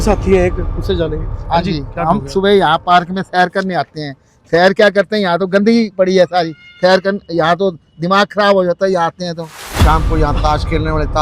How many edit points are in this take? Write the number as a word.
one